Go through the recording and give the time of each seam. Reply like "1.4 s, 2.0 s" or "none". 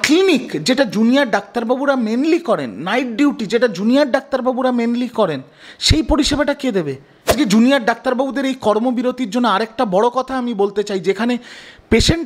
7.3 s